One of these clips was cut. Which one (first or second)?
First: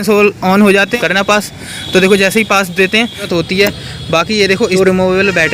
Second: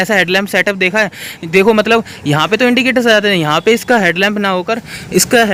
first